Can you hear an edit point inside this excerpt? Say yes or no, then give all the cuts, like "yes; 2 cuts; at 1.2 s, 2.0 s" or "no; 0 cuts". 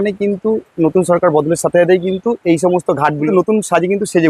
yes; 1 cut; at 3.3 s